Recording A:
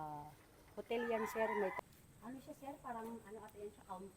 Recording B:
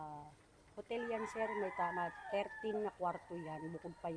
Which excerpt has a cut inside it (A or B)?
A